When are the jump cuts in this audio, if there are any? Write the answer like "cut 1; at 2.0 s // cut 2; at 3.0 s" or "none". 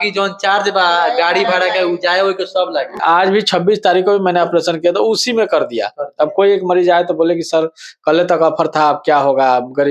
cut 1; at 3.0 s